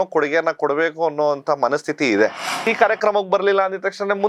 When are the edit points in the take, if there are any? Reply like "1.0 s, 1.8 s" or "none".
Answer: 2.6 s